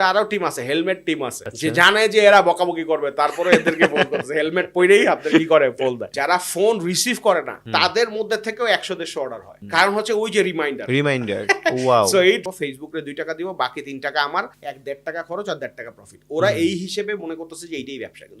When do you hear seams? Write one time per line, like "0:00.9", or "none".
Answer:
0:01.4
0:06.1
0:07.6
0:12.4